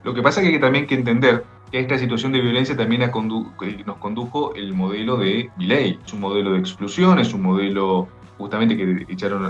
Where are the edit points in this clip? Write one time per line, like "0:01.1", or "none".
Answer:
0:01.6
0:06.1